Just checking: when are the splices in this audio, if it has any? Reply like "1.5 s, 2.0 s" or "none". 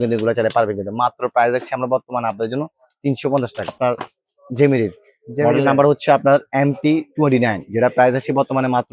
3.7 s